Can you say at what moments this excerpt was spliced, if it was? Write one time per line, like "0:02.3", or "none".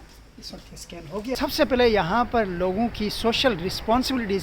0:01.8